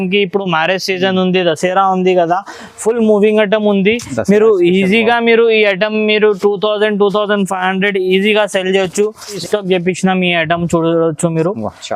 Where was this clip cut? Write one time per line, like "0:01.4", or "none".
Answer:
0:09.4